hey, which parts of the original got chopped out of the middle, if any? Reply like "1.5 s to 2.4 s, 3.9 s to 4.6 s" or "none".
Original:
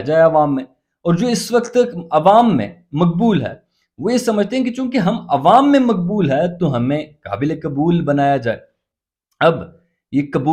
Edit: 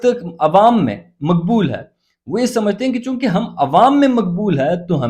none